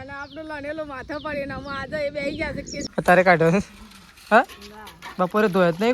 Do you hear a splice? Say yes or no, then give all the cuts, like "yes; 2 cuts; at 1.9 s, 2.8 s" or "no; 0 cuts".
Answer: yes; 1 cut; at 2.8 s